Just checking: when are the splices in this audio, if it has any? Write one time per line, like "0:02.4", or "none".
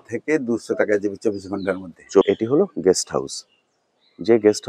0:02.2